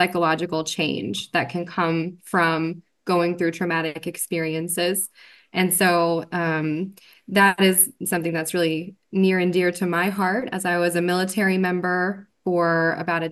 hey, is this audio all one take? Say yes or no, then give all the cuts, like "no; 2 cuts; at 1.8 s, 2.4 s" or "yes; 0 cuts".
yes; 0 cuts